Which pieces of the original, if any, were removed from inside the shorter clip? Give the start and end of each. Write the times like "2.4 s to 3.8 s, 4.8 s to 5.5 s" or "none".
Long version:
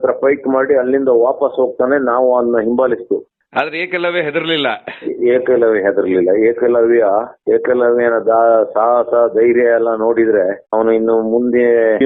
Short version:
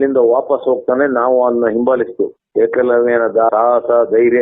3.3 s to 7.3 s, 8.4 s to 8.7 s